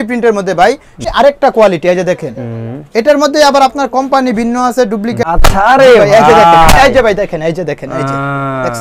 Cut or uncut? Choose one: cut